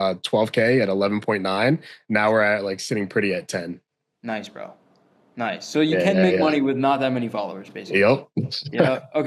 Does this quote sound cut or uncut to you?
uncut